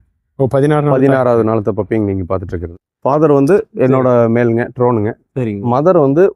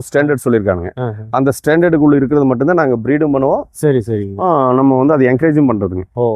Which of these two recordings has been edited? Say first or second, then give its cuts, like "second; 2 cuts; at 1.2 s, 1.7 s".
first; 1 cut; at 2.6 s